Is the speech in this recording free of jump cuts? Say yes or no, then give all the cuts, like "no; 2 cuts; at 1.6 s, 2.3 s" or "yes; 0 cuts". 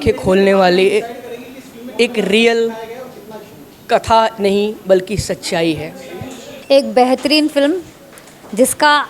no; 1 cut; at 6.5 s